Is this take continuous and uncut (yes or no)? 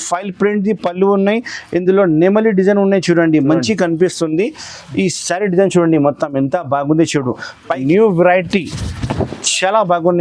no